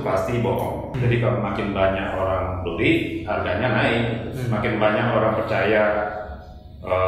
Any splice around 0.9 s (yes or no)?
yes